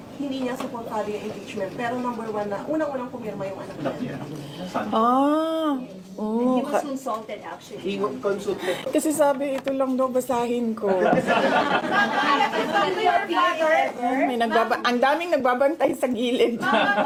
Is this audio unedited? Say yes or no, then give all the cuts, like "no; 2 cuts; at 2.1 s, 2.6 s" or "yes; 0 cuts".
yes; 0 cuts